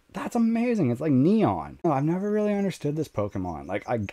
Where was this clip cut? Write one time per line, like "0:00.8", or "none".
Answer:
0:01.8

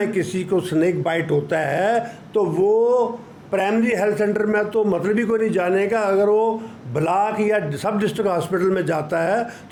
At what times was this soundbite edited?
none

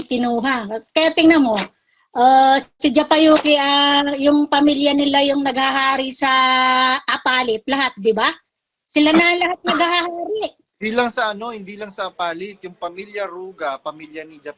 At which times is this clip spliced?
none

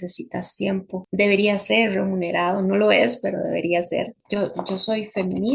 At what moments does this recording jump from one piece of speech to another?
0:01.0
0:04.2

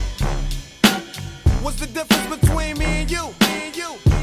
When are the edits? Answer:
0:01.4

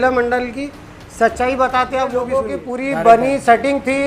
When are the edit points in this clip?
0:02.4

